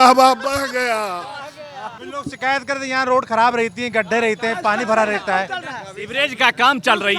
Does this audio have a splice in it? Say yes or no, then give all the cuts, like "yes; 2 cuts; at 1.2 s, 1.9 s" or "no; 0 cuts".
yes; 1 cut; at 2.0 s